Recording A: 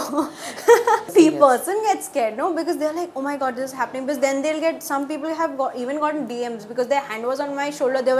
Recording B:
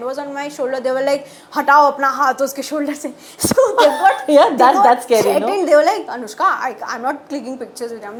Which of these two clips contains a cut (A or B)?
A